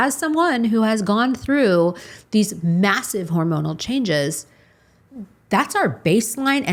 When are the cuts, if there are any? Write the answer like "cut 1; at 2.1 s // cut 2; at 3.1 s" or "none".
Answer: none